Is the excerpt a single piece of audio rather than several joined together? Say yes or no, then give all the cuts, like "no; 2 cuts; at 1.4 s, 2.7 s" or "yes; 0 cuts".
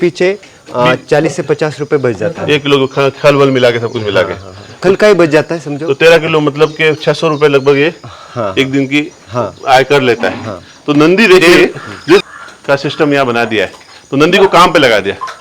no; 1 cut; at 12.2 s